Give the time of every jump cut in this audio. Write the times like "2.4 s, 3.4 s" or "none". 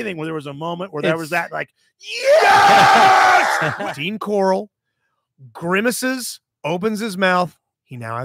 3.7 s